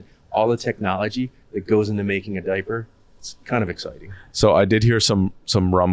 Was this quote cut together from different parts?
no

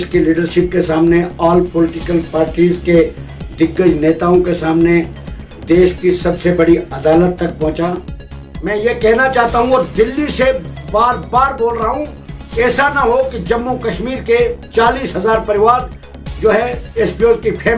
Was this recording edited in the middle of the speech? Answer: yes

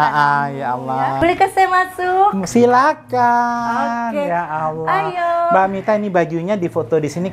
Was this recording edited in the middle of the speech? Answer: yes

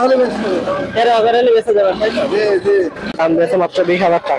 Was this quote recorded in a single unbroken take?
no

